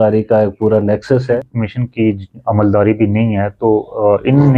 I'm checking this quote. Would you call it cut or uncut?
cut